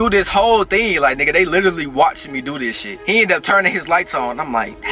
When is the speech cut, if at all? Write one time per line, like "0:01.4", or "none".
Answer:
none